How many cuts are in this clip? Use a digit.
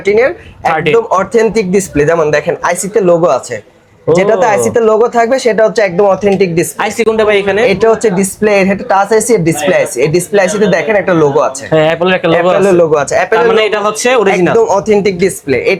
0